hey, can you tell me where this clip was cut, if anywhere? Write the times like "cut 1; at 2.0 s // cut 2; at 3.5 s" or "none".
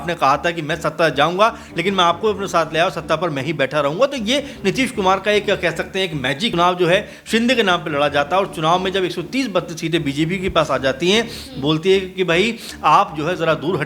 cut 1; at 6.5 s